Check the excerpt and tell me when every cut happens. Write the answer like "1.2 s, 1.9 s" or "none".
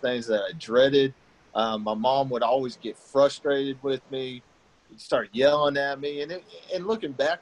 none